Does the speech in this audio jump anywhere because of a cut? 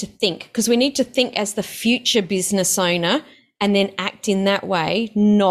no; 0 cuts

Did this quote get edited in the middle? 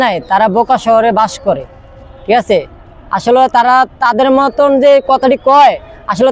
no; 0 cuts

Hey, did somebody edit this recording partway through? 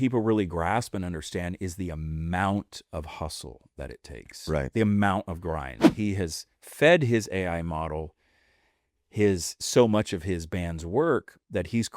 yes; 1 cut; at 5.8 s

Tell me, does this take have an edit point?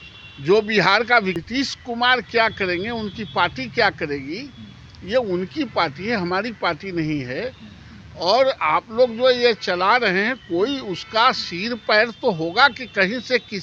yes; 1 cut; at 1.4 s

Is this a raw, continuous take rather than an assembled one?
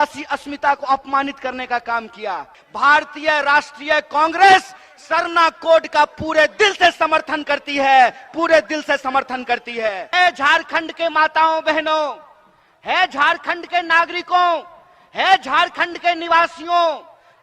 no; 2 cuts; at 2.6 s, 10.1 s

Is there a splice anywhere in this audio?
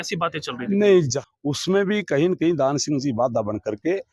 yes; 1 cut; at 1.2 s

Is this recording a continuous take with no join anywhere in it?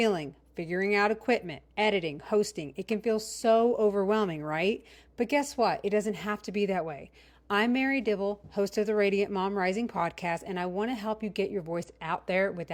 yes; 0 cuts

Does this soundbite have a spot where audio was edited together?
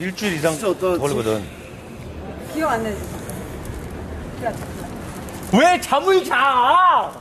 no; 0 cuts

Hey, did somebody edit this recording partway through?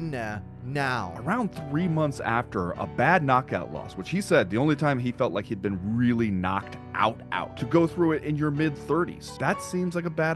yes; 3 cuts; at 1.1 s, 7.5 s, 9.4 s

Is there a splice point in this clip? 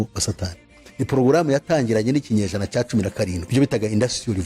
yes; 1 cut; at 3.4 s

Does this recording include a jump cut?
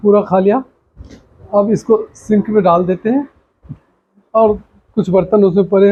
no; 0 cuts

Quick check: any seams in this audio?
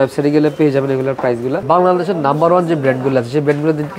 yes; 1 cut; at 1.6 s

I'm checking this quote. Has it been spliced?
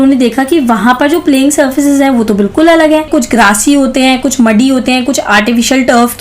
yes; 1 cut; at 3.1 s

